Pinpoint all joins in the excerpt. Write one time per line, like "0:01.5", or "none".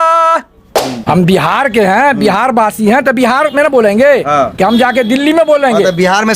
0:01.1